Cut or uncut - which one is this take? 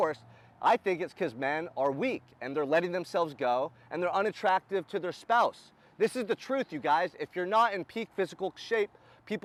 uncut